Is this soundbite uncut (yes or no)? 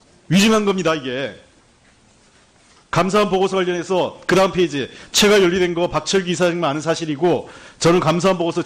yes